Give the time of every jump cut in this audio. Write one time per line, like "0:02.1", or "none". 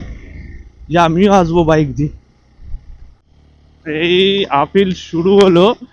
0:03.3